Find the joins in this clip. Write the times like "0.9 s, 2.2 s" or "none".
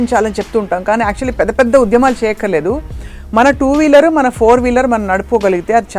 none